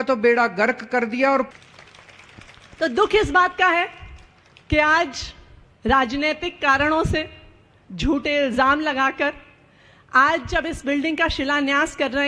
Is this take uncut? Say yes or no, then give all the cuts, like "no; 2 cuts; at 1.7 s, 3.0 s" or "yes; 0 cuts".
no; 1 cut; at 1.5 s